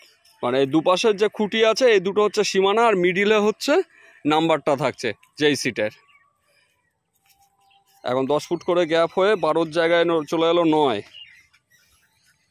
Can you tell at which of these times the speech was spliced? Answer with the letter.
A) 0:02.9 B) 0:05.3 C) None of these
C